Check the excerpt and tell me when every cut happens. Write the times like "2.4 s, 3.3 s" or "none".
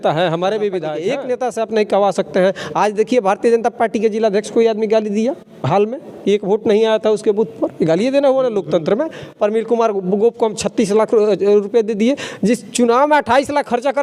1.0 s